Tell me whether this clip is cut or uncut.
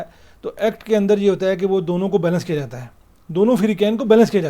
uncut